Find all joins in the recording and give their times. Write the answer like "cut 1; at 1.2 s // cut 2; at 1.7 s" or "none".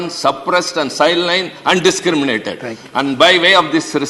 none